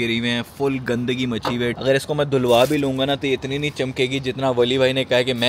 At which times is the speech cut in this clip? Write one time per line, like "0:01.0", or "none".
none